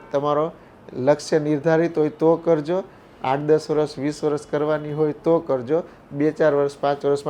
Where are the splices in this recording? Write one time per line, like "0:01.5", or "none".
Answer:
none

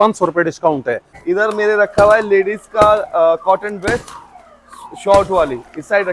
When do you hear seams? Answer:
0:01.1

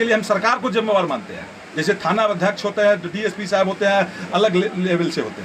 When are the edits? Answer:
none

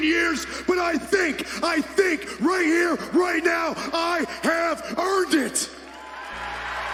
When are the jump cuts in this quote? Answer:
none

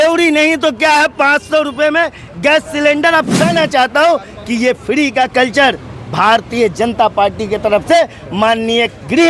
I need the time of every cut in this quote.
0:03.4

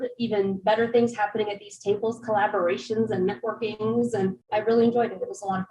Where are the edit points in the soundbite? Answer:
0:04.5

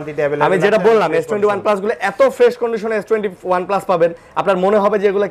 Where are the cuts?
none

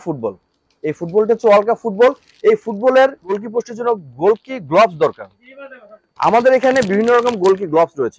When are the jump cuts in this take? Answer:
0:03.4

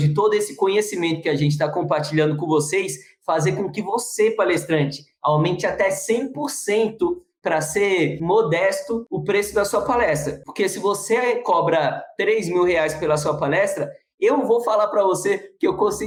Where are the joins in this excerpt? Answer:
none

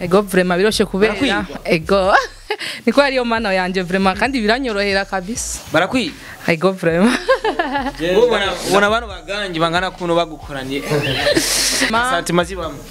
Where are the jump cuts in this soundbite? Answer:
0:11.9

